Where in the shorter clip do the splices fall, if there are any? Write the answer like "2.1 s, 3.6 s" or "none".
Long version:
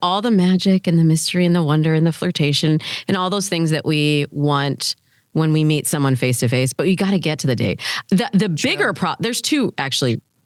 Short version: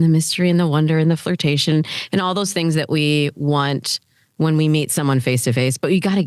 none